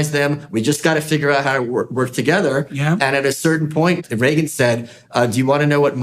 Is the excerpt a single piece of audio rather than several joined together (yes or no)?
no